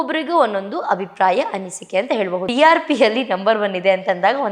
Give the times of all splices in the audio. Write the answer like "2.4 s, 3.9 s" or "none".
2.5 s